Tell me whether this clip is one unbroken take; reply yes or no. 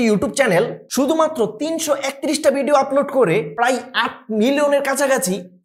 yes